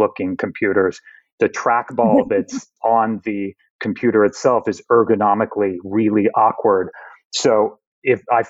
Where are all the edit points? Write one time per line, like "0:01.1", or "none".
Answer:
0:01.2
0:02.7